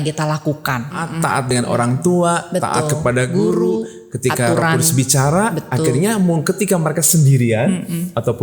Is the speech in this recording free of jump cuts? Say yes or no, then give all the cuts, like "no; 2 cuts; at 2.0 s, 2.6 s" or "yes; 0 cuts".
no; 1 cut; at 1.4 s